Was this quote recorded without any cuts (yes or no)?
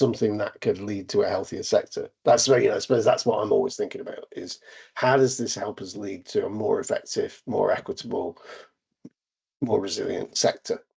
yes